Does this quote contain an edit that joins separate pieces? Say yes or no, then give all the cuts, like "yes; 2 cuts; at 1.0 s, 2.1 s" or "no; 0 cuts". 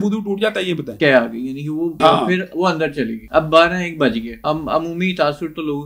yes; 4 cuts; at 0.9 s, 1.9 s, 3.2 s, 4.3 s